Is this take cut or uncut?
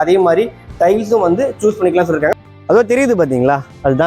cut